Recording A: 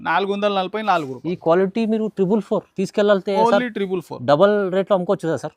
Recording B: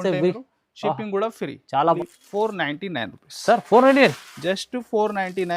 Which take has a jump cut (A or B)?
B